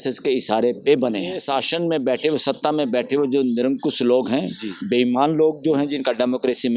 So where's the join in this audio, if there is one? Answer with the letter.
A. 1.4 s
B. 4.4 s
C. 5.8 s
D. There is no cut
A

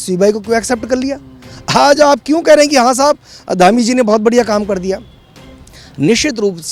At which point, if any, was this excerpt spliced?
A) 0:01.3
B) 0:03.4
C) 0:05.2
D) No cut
D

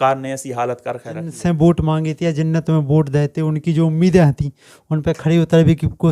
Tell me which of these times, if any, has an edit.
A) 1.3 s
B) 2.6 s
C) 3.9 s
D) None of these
A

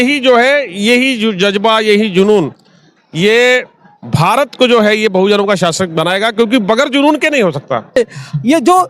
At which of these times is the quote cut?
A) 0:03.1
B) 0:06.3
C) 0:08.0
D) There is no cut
C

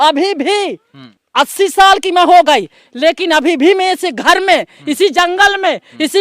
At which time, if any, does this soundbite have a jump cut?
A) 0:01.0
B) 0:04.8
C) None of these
A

